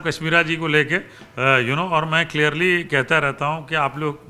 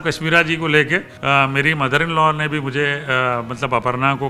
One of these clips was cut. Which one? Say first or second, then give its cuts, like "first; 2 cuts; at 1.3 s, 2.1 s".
second; 1 cut; at 1.1 s